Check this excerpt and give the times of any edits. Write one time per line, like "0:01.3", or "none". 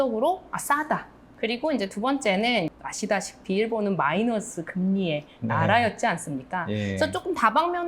0:01.2
0:02.7